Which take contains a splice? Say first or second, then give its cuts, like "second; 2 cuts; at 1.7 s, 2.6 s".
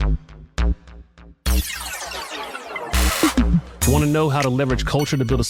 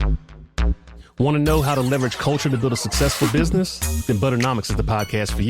second; 1 cut; at 1.1 s